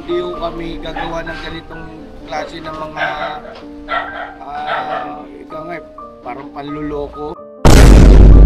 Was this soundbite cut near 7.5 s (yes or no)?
yes